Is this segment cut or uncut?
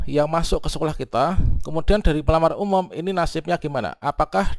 uncut